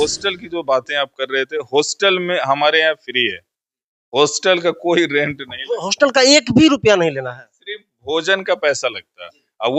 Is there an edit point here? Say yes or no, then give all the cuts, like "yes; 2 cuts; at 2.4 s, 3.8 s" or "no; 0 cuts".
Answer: no; 0 cuts